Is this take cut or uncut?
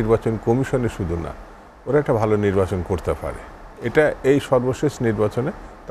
uncut